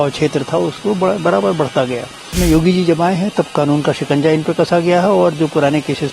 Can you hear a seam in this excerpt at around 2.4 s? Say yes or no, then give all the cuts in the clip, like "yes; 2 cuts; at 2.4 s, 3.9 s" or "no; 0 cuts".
yes; 1 cut; at 2.4 s